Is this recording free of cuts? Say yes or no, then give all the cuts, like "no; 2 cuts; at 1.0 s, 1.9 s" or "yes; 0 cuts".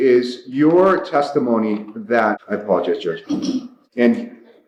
yes; 0 cuts